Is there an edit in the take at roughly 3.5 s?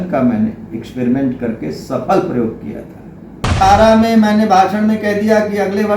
yes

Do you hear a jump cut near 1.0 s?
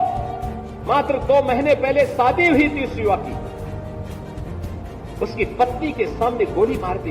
no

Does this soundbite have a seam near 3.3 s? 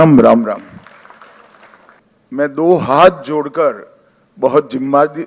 no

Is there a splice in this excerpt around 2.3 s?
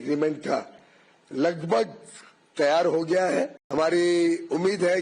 no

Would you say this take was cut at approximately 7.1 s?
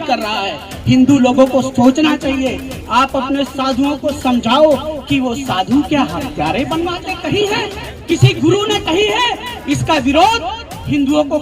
yes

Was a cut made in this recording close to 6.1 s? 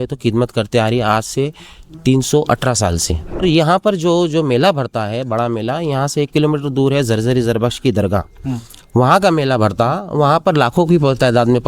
no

